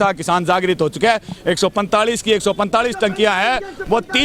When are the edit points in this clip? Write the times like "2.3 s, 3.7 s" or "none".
none

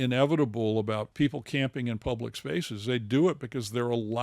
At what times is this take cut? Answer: 1.1 s

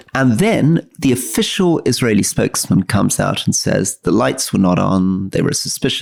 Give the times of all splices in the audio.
none

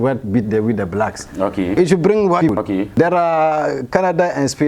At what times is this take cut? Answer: 1.8 s, 2.5 s

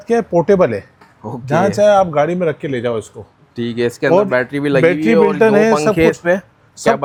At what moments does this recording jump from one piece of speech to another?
none

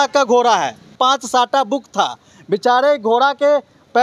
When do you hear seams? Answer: 0.9 s

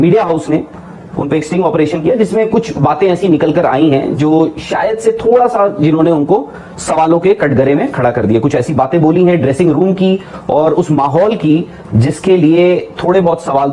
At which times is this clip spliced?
none

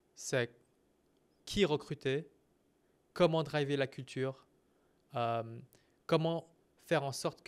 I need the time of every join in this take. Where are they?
1.4 s

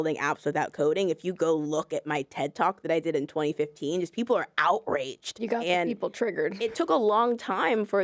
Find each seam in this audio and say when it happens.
5.4 s, 6.9 s

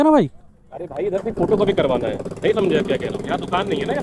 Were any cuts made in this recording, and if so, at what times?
none

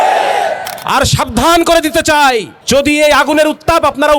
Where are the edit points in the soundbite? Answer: 2.5 s

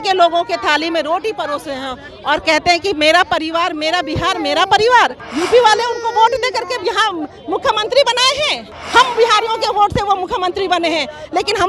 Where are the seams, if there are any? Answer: 5.2 s, 8.7 s

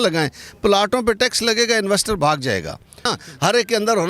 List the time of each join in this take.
3.1 s

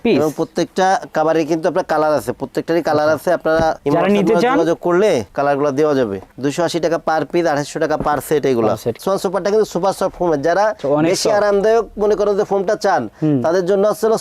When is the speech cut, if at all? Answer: 9.0 s

